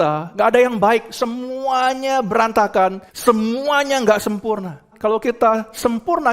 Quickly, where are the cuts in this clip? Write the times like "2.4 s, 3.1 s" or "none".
3.1 s, 4.9 s